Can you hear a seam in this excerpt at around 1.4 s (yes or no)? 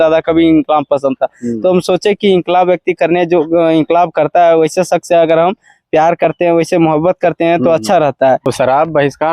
no